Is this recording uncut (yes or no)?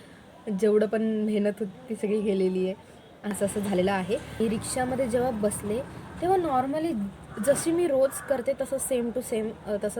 no